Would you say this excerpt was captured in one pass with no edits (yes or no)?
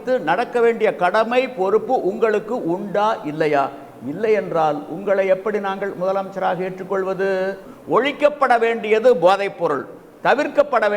no